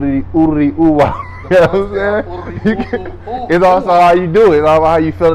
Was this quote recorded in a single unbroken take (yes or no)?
yes